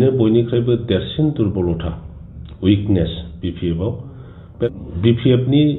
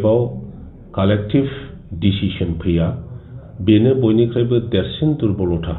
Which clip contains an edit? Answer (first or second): first